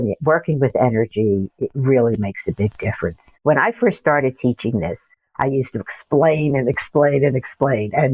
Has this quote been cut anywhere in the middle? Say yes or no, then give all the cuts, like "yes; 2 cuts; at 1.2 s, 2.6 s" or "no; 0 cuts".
yes; 1 cut; at 3.4 s